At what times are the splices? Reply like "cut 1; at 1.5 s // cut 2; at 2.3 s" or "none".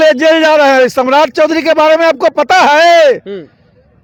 none